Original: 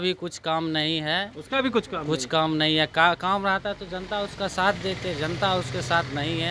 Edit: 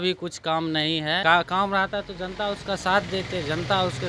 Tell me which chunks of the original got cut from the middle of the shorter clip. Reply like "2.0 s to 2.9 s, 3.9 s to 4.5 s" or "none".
1.2 s to 2.9 s

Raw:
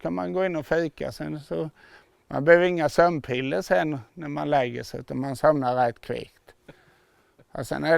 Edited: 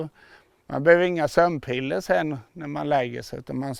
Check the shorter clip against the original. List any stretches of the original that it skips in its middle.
none

